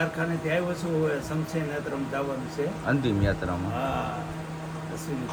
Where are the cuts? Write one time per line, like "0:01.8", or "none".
none